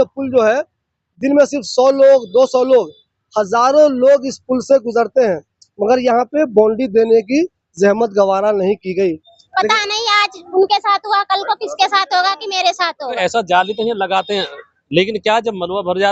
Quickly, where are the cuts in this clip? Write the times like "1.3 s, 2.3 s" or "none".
9.4 s, 13.2 s

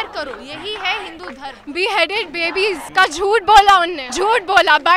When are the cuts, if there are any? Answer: 1.6 s, 2.8 s, 4.0 s

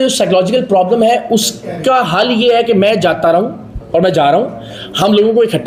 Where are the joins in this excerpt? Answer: none

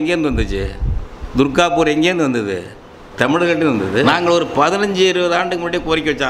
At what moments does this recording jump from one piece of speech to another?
4.0 s

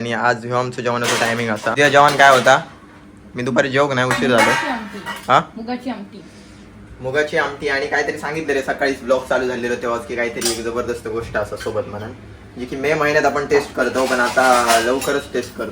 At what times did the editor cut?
1.7 s

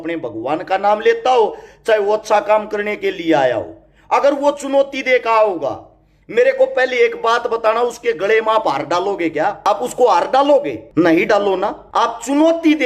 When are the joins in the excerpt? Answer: 9.6 s, 10.8 s, 11.8 s

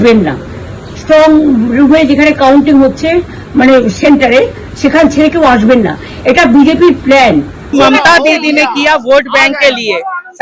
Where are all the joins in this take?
7.7 s

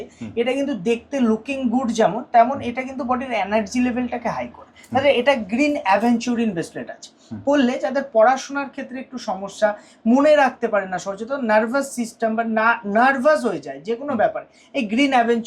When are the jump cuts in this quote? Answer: none

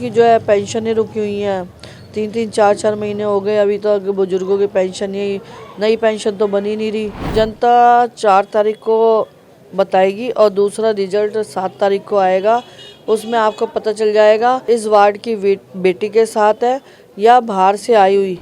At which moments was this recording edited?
7.3 s, 14.6 s

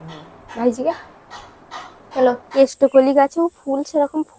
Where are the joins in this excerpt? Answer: 2.6 s

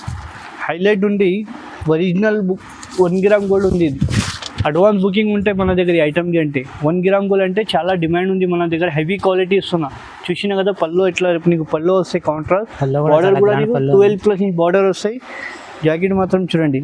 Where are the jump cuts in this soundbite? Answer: none

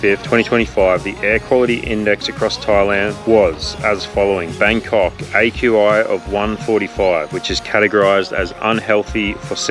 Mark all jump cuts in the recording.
none

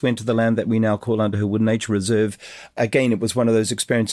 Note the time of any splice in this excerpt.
2.8 s

